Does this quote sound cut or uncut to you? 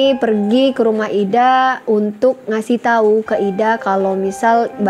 uncut